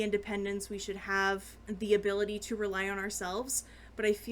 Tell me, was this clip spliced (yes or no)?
yes